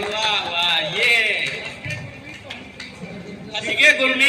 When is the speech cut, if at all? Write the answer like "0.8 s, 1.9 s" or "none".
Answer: none